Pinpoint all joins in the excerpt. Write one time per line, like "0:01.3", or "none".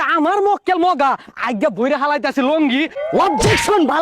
0:03.0